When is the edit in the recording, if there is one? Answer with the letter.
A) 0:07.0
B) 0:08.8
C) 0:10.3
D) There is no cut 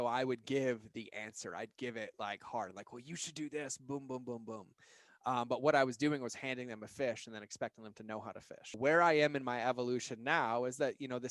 B